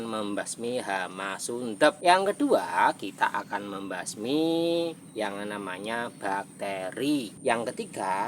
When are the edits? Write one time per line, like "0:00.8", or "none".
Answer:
0:02.0
0:07.3